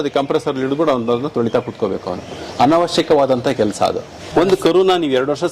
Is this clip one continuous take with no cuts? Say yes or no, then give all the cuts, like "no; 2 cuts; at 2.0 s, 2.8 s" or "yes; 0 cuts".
no; 1 cut; at 4.3 s